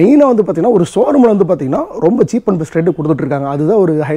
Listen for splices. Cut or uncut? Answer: uncut